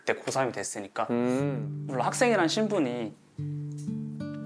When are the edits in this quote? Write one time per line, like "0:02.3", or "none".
0:01.7